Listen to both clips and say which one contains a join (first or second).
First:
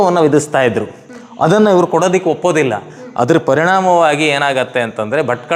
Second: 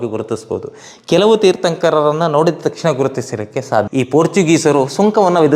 second